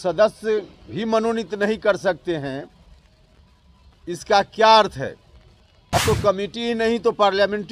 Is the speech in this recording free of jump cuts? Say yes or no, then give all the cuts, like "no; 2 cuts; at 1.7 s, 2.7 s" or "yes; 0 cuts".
no; 1 cut; at 6.0 s